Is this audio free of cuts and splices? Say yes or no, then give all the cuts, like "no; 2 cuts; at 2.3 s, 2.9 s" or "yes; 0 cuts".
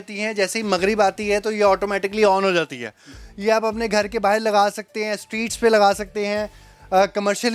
no; 1 cut; at 3.2 s